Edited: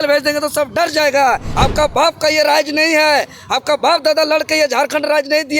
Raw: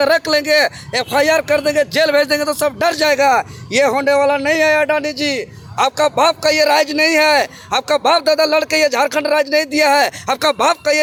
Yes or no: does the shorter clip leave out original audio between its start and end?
yes